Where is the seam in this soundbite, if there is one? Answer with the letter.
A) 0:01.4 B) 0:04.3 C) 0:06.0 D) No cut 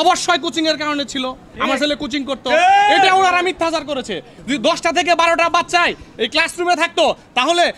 B